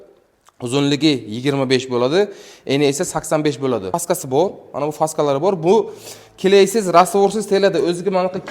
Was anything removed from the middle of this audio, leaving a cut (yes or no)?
yes